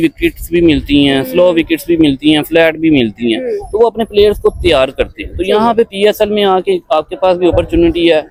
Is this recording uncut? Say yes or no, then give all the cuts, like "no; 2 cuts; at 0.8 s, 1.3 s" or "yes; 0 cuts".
yes; 0 cuts